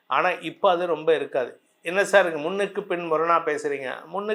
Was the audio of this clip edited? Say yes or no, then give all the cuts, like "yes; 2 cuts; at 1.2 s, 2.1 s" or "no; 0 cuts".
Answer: no; 0 cuts